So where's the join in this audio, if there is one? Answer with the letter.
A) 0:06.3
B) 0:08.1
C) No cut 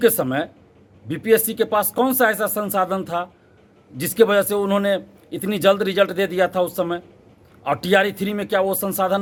C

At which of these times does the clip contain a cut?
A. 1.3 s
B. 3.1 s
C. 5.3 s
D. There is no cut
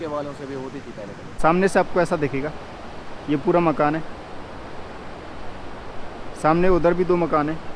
A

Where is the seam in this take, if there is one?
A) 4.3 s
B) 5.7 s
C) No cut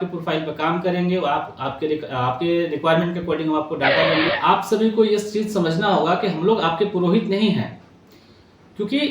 A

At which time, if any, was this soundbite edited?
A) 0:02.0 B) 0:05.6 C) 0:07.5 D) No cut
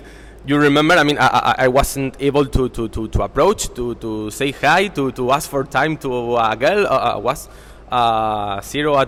D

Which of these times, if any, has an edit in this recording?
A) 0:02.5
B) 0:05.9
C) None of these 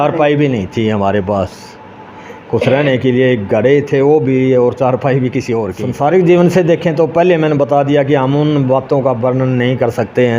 B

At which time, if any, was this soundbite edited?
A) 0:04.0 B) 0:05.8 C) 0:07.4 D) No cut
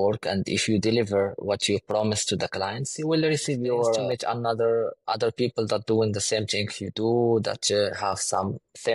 A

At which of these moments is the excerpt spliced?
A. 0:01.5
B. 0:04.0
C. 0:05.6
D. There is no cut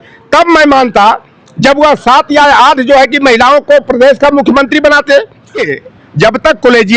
C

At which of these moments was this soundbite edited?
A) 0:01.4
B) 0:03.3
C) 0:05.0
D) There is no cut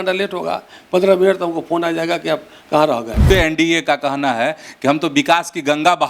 B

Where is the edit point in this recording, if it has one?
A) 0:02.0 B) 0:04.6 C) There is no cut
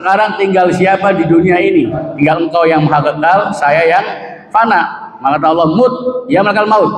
A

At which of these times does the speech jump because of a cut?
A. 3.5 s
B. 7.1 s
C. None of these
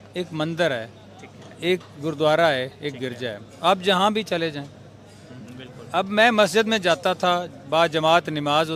C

